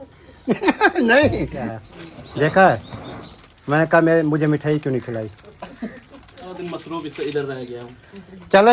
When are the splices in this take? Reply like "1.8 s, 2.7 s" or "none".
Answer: 1.7 s, 6.6 s